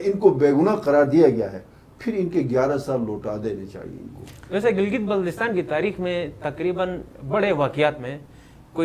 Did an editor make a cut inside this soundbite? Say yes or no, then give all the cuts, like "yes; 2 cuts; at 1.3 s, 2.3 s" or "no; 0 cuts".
no; 0 cuts